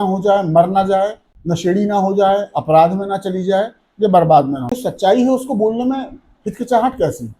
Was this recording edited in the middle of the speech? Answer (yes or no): yes